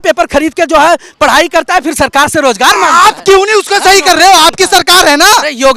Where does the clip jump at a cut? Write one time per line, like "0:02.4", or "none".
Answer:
none

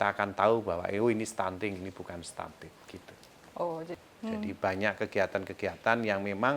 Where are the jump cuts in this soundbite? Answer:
0:03.9

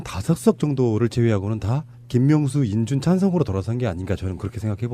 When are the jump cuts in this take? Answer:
0:02.1

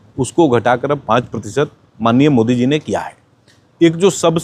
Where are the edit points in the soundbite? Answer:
none

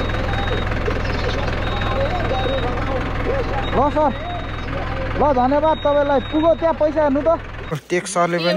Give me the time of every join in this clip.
0:07.6

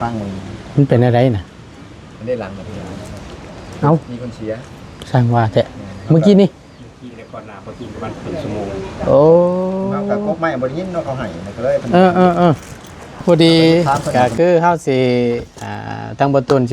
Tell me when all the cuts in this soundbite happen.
0:13.2

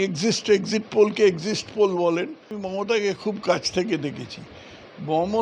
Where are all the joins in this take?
0:02.6

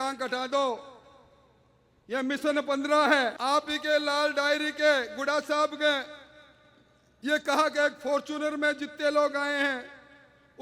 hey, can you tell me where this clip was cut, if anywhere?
0:03.4

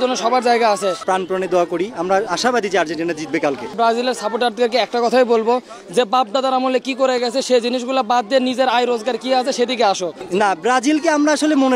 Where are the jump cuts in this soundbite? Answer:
0:01.0
0:03.7
0:10.2

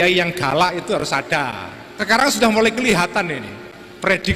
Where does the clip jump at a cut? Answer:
0:01.9

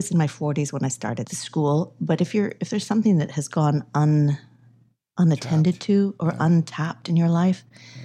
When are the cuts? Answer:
0:01.2

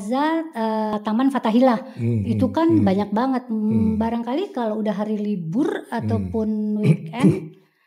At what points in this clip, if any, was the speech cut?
0:00.9

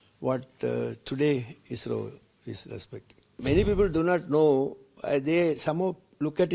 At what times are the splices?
0:03.4

